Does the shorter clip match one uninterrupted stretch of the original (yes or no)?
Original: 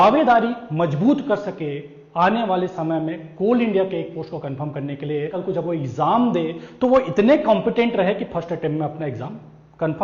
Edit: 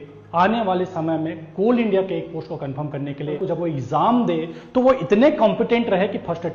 no